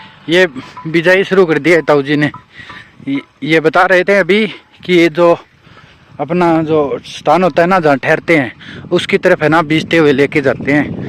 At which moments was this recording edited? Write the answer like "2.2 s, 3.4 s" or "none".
none